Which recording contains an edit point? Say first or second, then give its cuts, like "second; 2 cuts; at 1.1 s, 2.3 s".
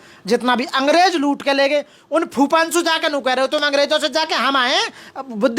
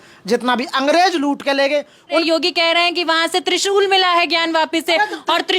second; 1 cut; at 2.2 s